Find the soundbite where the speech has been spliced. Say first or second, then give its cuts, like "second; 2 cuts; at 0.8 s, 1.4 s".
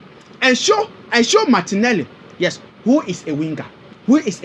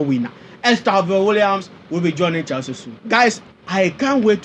second; 1 cut; at 3.5 s